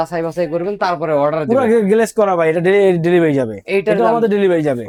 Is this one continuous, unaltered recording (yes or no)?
yes